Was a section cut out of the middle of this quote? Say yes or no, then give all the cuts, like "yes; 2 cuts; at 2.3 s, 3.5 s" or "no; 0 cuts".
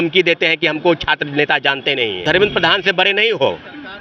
yes; 1 cut; at 2.2 s